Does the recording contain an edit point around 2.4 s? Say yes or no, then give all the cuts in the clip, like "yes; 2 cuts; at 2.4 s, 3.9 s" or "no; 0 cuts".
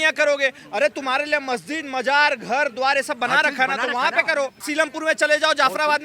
no; 1 cut; at 4.7 s